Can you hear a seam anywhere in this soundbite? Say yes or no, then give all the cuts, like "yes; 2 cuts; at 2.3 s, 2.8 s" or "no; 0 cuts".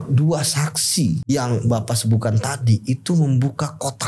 yes; 1 cut; at 1.2 s